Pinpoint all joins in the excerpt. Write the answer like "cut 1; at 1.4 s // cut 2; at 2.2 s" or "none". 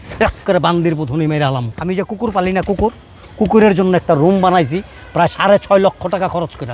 cut 1; at 1.7 s

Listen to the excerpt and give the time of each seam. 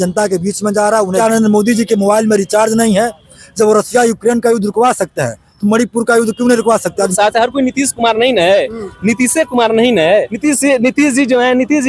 cut 1; at 1.1 s // cut 2; at 7.1 s // cut 3; at 10.3 s

